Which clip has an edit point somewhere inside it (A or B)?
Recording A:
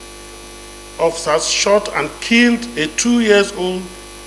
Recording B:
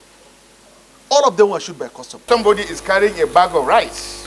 B